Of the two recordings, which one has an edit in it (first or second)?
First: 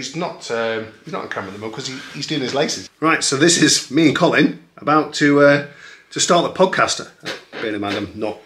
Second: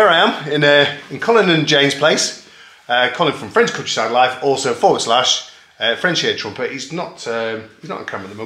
first